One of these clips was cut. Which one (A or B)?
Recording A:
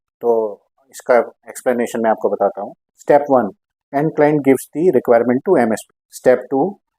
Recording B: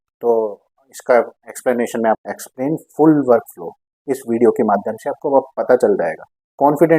B